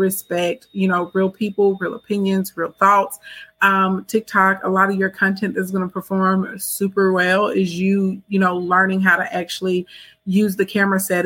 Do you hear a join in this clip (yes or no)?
no